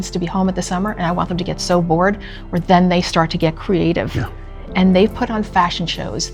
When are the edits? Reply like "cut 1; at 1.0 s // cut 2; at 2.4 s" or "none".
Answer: none